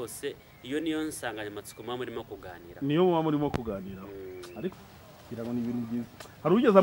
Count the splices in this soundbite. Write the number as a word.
one